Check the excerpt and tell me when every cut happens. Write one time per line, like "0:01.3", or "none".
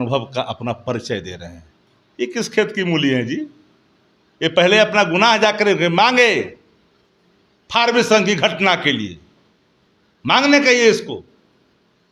none